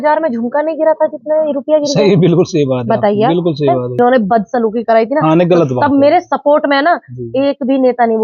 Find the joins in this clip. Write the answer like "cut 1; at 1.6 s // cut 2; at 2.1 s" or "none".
cut 1; at 4.0 s